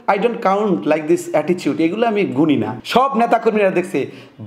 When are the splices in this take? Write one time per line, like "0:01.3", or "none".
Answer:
0:02.8